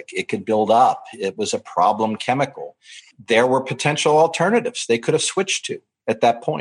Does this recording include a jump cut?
yes; 1 cut; at 3.1 s

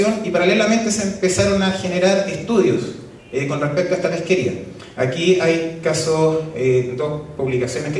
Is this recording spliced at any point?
no; 0 cuts

